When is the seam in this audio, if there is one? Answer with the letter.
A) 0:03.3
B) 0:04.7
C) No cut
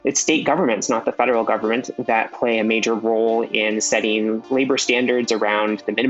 C